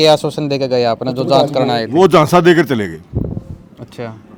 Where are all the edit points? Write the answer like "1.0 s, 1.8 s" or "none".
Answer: none